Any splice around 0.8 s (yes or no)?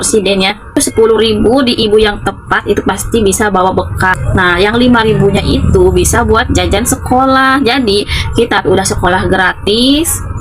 yes